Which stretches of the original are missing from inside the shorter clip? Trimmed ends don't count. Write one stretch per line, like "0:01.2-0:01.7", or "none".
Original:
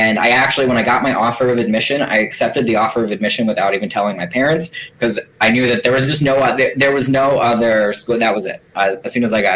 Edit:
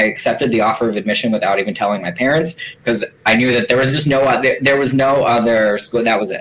none